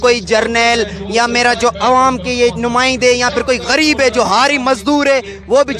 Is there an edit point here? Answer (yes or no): no